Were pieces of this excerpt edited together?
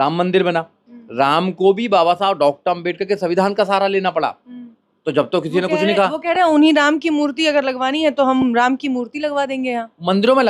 no; 0 cuts

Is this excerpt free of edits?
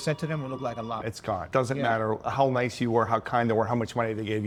yes; 0 cuts

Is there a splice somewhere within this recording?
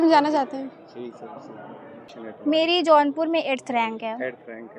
yes; 1 cut; at 2.1 s

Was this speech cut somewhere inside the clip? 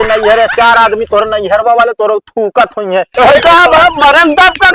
yes; 1 cut; at 3.2 s

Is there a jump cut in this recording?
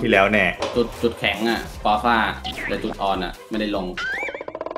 no; 0 cuts

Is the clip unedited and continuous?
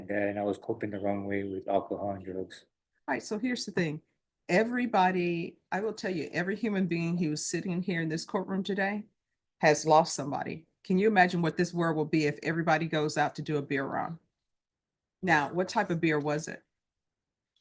yes; 0 cuts

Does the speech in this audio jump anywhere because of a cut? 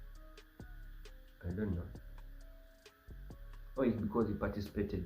yes; 1 cut; at 1.3 s

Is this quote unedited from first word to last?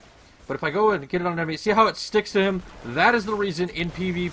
no; 1 cut; at 1.6 s

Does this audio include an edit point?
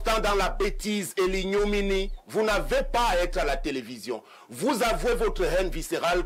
no; 0 cuts

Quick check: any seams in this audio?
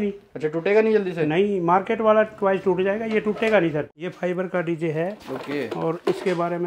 yes; 1 cut; at 3.9 s

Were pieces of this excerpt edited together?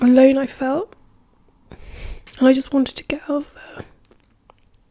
yes; 1 cut; at 2.3 s

